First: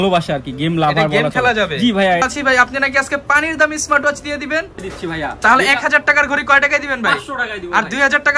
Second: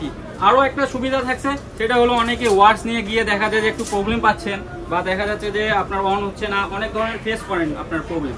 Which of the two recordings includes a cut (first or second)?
first